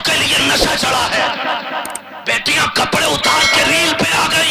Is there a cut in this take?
yes; 1 cut; at 1.9 s

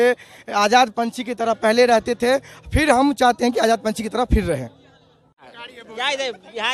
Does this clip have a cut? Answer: yes; 1 cut; at 5.4 s

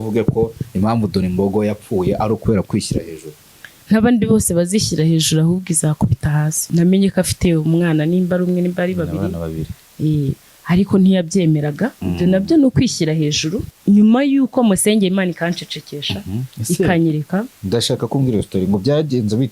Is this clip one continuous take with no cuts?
no; 2 cuts; at 6.6 s, 13.7 s

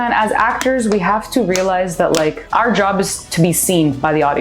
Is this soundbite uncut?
no; 1 cut; at 2.4 s

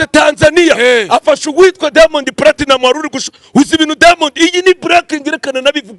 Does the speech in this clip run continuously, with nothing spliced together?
yes; 0 cuts

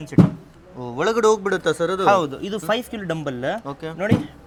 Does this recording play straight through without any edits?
yes; 0 cuts

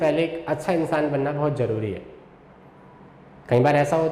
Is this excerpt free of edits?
yes; 0 cuts

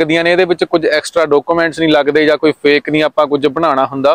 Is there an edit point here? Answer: no; 0 cuts

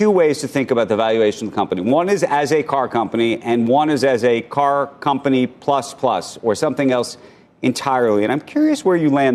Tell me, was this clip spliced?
no; 0 cuts

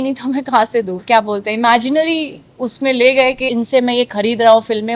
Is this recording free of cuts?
no; 2 cuts; at 1.0 s, 3.4 s

